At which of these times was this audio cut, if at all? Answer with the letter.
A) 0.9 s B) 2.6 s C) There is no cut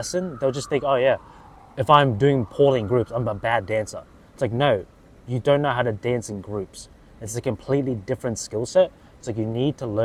C